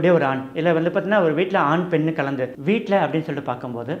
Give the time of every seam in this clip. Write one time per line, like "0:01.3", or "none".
0:02.6